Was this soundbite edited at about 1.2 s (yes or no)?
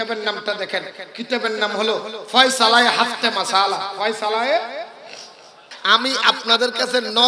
no